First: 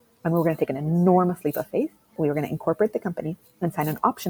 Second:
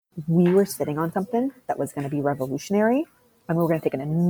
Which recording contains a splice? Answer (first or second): first